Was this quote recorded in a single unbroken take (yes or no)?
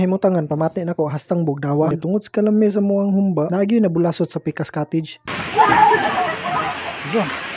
no